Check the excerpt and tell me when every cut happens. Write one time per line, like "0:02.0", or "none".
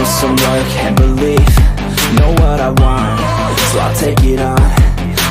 0:00.9